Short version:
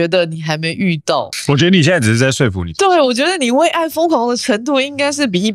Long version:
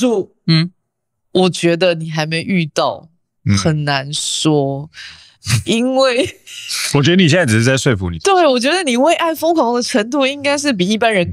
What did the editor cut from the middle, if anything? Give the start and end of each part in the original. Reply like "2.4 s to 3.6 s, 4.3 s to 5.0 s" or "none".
3.0 s to 6.8 s